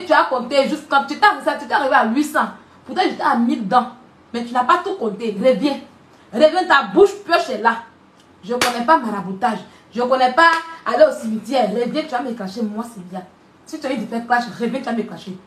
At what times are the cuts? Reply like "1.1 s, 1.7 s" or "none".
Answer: none